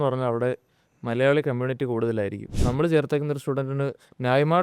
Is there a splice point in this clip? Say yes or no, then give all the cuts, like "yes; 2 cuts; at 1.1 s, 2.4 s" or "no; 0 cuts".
yes; 1 cut; at 2.5 s